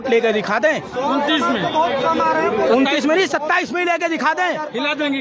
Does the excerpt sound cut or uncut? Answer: uncut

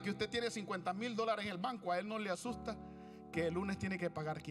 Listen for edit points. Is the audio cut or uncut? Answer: uncut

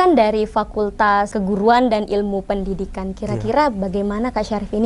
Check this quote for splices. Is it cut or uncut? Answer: cut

